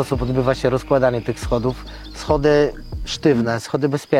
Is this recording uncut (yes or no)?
yes